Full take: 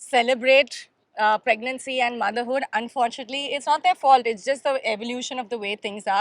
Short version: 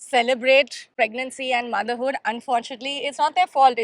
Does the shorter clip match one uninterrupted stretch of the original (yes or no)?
no